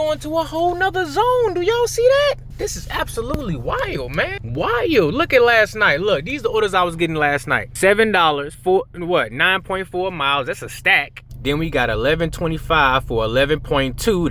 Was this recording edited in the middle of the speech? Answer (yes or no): no